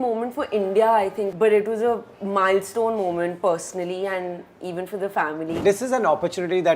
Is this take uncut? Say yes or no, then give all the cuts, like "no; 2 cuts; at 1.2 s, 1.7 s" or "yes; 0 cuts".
no; 2 cuts; at 1.3 s, 5.6 s